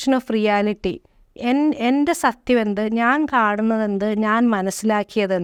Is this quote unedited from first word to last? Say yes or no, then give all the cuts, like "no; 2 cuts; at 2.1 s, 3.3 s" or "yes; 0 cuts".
yes; 0 cuts